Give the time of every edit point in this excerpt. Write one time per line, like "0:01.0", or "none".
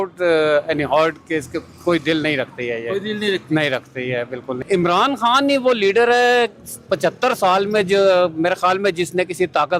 0:04.6